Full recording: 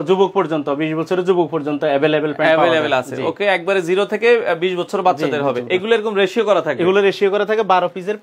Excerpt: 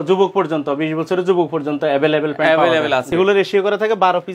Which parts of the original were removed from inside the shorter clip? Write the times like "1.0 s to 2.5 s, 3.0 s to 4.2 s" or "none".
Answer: 3.1 s to 6.8 s